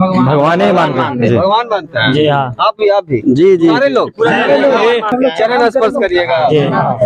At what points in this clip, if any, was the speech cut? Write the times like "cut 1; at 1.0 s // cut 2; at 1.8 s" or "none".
cut 1; at 5.1 s